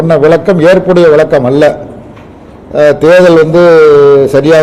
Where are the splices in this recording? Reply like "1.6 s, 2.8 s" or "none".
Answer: none